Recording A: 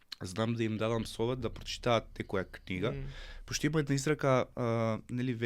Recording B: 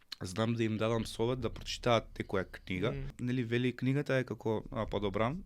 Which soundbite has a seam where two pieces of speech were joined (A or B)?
B